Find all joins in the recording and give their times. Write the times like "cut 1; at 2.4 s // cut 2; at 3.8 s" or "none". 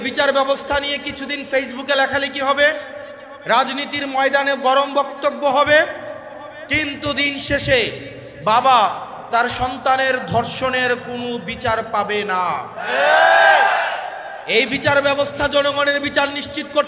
none